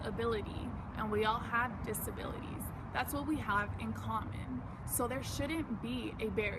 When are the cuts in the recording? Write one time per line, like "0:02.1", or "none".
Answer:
none